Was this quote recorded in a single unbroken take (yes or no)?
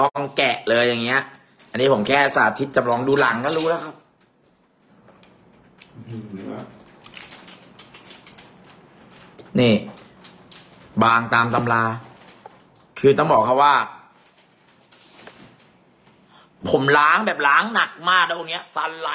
yes